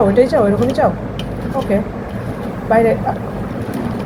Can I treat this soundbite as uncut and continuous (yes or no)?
yes